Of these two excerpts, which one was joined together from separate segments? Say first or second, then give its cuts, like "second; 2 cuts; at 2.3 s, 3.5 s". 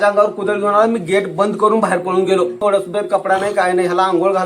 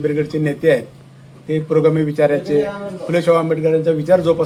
first; 1 cut; at 2.6 s